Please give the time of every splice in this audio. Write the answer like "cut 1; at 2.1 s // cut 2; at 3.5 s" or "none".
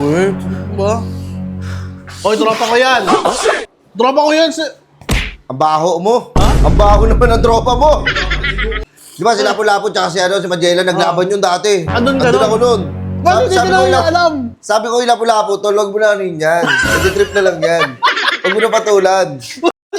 cut 1; at 8.7 s